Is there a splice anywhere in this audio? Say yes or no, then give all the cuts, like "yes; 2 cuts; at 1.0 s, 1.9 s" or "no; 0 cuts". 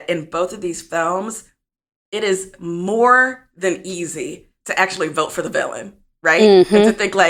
no; 0 cuts